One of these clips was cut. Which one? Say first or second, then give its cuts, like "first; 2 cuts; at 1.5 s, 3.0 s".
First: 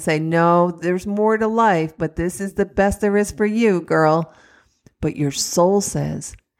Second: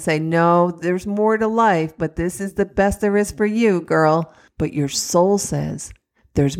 second; 1 cut; at 4.4 s